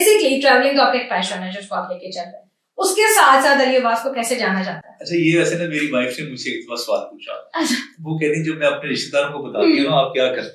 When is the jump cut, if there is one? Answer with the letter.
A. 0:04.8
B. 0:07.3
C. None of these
C